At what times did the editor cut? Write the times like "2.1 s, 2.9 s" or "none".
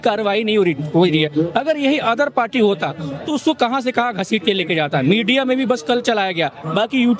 none